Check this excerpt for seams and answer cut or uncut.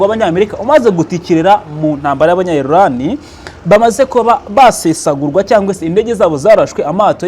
uncut